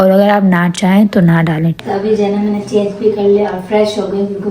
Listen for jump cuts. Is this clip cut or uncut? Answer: cut